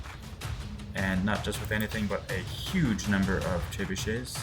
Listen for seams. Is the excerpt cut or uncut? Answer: uncut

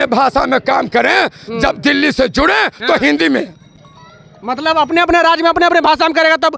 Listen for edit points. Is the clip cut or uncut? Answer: uncut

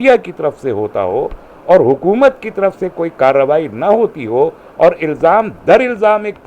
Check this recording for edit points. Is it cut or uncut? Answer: uncut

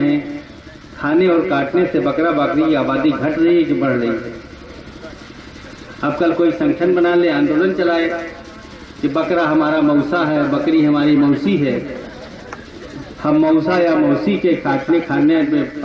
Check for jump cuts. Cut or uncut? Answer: uncut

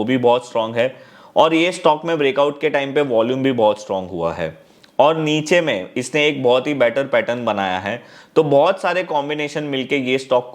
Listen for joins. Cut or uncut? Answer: uncut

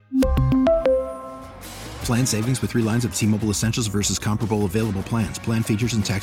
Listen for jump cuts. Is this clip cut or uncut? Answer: uncut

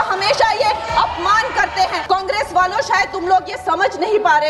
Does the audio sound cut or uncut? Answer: cut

